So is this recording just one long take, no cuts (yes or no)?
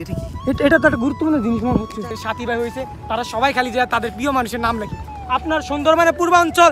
no